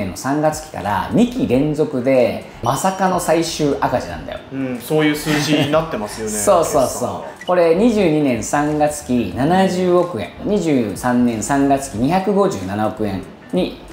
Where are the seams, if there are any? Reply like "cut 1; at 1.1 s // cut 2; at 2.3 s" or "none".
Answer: none